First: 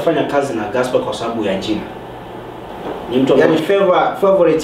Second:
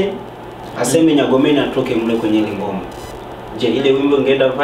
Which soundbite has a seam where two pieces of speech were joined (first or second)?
first